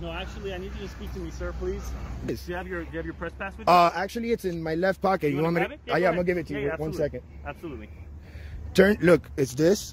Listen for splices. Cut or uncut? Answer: cut